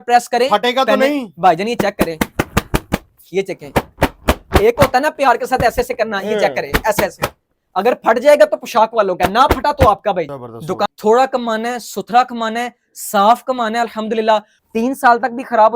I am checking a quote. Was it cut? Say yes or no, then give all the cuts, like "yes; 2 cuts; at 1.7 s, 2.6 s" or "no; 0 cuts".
yes; 2 cuts; at 10.6 s, 14.5 s